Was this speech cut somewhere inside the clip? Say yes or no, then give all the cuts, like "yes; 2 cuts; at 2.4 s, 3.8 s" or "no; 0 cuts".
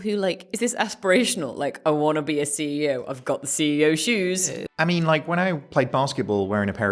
yes; 1 cut; at 4.6 s